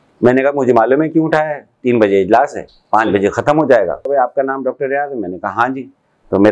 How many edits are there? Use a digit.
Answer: 1